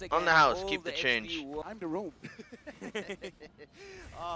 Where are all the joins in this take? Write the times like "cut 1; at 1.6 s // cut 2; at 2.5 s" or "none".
cut 1; at 1.6 s